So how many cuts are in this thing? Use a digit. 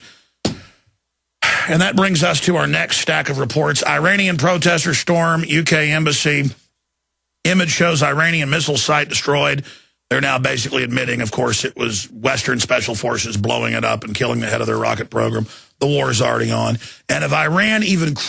1